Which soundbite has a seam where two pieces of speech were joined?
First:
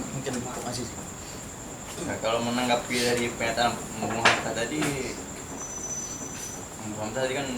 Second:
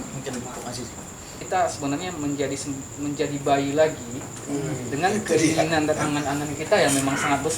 second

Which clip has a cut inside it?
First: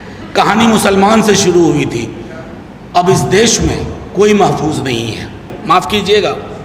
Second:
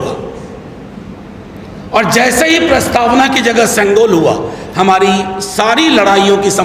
first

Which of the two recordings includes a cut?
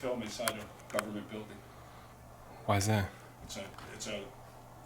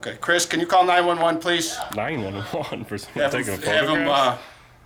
first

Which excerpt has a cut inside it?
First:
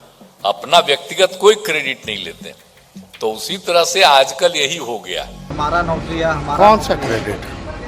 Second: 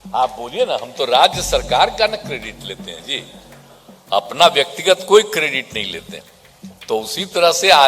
first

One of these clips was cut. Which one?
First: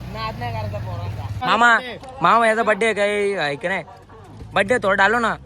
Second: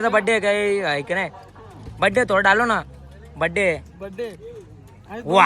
first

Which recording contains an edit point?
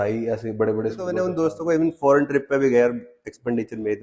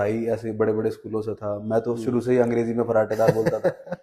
first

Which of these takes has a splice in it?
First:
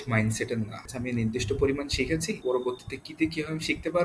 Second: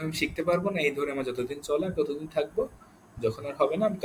first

